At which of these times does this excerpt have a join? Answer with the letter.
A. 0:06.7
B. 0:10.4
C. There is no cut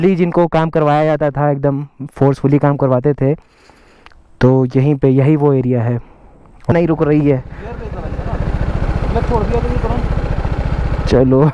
A